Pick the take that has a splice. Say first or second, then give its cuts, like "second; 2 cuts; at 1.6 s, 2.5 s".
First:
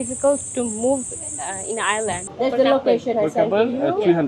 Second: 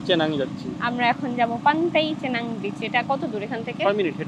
first; 1 cut; at 2.3 s